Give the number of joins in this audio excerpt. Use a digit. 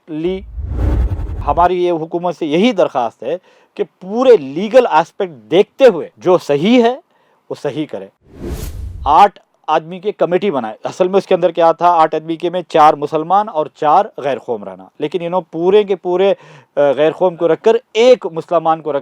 3